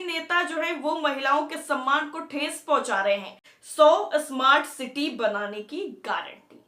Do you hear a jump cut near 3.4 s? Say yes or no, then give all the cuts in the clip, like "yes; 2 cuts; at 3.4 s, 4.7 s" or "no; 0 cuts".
yes; 1 cut; at 3.4 s